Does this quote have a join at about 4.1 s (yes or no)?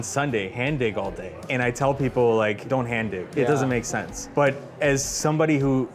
yes